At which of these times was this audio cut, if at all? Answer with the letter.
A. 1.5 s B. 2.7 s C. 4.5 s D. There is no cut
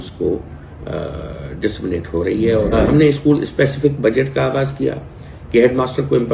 B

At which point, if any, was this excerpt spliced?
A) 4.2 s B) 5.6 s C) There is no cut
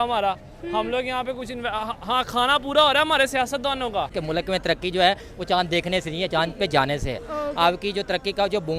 A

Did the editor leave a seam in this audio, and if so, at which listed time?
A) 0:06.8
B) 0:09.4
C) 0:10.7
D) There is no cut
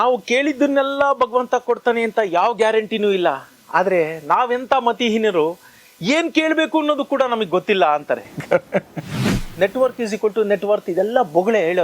B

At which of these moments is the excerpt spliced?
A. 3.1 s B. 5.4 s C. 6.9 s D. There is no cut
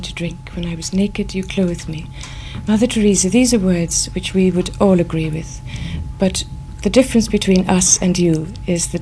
D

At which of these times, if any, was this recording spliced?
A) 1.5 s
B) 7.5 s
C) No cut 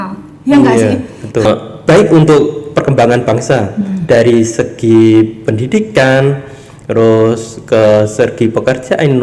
A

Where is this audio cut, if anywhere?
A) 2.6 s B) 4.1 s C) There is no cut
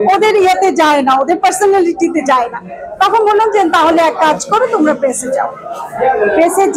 C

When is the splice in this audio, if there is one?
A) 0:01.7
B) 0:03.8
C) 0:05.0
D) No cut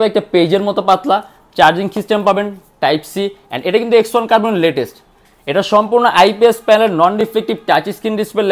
D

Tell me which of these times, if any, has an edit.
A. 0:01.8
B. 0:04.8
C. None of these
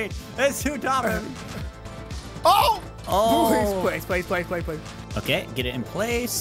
B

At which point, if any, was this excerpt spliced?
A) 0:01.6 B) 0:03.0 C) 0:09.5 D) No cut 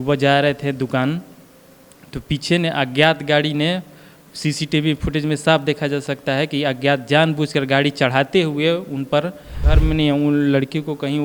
C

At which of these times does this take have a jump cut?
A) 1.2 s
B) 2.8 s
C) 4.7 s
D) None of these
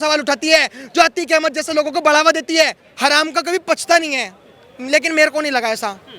B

